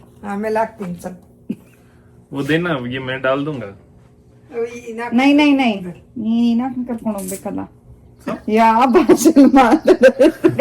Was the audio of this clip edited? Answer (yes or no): no